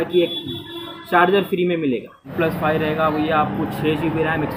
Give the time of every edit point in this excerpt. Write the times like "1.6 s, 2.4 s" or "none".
2.2 s